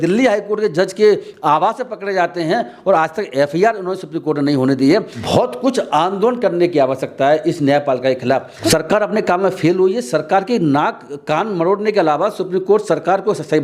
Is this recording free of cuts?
no; 2 cuts; at 5.2 s, 8.6 s

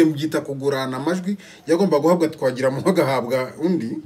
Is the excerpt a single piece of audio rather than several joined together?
yes; 0 cuts

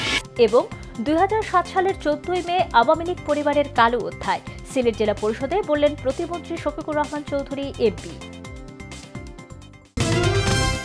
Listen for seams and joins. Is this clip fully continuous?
no; 1 cut; at 9.9 s

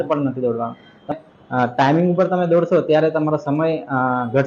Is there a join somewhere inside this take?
yes; 1 cut; at 1.1 s

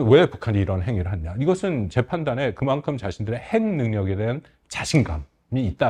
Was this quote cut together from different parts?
no; 0 cuts

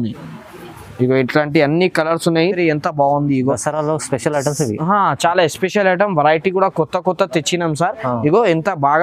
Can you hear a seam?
yes; 1 cut; at 2.5 s

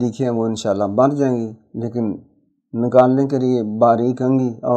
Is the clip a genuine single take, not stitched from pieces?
yes; 0 cuts

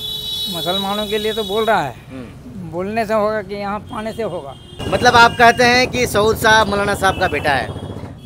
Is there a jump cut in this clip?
yes; 1 cut; at 4.7 s

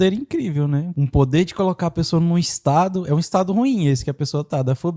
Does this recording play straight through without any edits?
no; 1 cut; at 0.9 s

